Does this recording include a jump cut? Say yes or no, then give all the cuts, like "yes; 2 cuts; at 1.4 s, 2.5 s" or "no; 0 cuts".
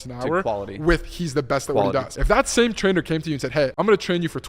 yes; 2 cuts; at 2.1 s, 3.7 s